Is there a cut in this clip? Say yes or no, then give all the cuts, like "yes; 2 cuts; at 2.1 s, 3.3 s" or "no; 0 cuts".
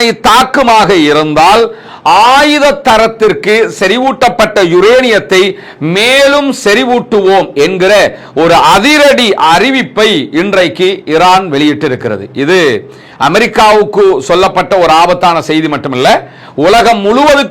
no; 0 cuts